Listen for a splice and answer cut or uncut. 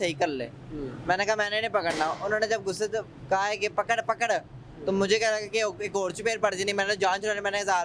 uncut